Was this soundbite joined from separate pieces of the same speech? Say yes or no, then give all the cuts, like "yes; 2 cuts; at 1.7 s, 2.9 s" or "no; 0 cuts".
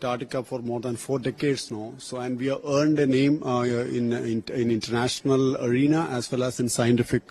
no; 0 cuts